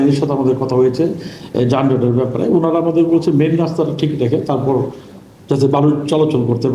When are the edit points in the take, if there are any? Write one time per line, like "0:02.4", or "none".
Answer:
none